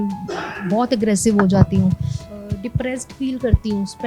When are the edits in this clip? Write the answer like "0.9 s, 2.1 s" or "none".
2.3 s